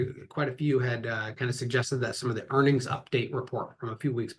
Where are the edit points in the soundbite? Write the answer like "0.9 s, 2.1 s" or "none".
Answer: none